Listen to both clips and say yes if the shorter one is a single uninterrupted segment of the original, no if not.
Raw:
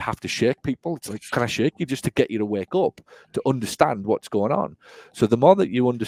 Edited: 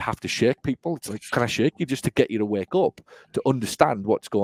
yes